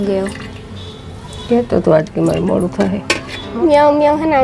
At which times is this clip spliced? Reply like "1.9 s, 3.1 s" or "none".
3.5 s